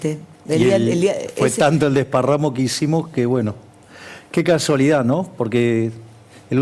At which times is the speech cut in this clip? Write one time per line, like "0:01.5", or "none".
none